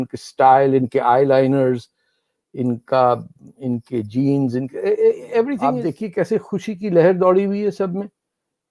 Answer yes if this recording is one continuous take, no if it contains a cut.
no